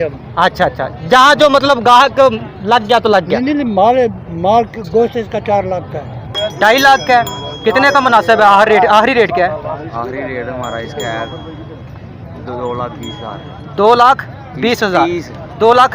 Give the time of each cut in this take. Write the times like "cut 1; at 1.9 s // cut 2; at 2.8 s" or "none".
cut 1; at 6.3 s